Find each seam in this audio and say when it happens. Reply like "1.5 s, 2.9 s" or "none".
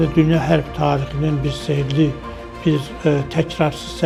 none

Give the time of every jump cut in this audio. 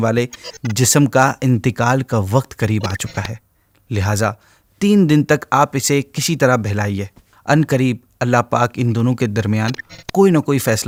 none

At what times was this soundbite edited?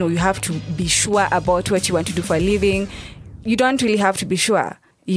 none

